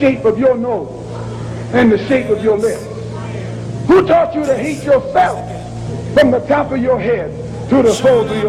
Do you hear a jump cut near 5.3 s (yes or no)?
no